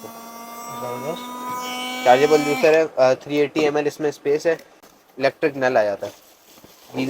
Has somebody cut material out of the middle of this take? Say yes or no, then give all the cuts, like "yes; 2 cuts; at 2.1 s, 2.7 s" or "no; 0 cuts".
yes; 1 cut; at 4.8 s